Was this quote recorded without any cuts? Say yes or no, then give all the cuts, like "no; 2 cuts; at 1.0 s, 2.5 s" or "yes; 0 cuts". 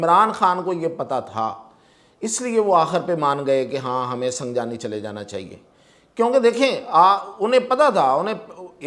yes; 0 cuts